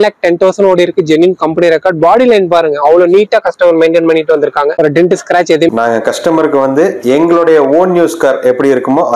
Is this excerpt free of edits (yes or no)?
no